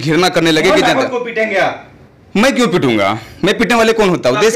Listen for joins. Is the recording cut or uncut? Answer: uncut